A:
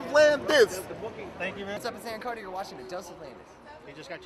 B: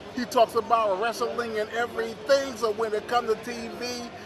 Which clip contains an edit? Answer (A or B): A